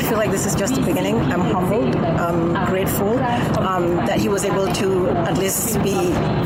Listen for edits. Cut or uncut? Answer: uncut